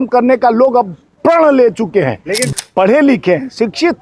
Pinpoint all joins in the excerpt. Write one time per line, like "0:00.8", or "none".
0:02.5